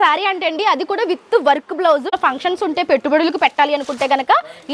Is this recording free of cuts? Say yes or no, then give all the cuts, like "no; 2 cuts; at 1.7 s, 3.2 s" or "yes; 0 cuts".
no; 1 cut; at 2.1 s